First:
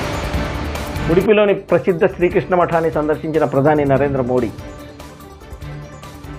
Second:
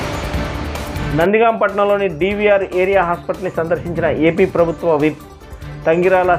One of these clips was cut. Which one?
second; 1 cut; at 1.0 s

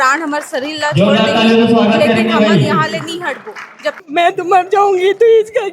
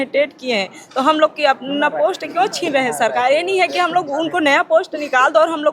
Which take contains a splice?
first; 1 cut; at 4.0 s

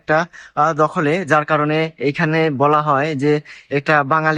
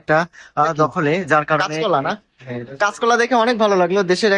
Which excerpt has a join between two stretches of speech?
second; 1 cut; at 1.6 s

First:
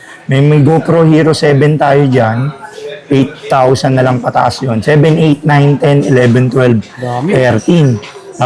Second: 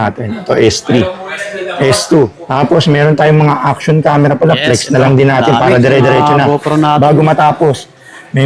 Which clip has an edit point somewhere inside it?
second; 1 cut; at 2.4 s

